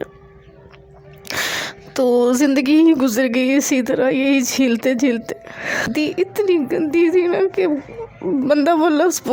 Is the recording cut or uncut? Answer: cut